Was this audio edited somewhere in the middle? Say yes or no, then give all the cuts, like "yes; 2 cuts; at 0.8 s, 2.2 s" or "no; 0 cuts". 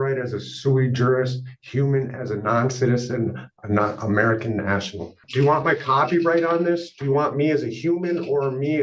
yes; 1 cut; at 5.2 s